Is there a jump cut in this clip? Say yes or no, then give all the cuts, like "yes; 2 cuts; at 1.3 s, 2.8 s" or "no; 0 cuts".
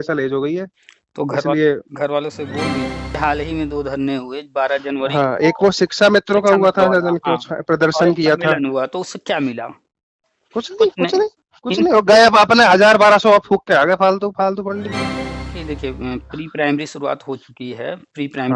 yes; 2 cuts; at 3.2 s, 15.1 s